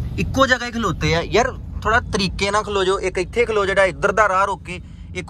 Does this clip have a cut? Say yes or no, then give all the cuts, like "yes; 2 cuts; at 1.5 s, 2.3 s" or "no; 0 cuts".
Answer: no; 0 cuts